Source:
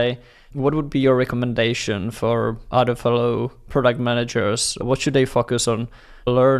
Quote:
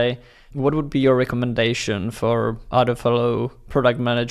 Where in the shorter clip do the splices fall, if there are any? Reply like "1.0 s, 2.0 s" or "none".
none